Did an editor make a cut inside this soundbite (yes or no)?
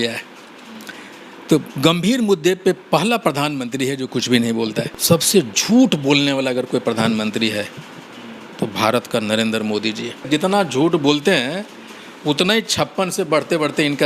yes